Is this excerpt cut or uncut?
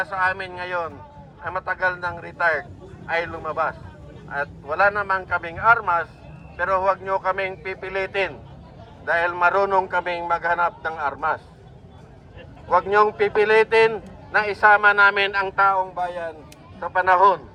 uncut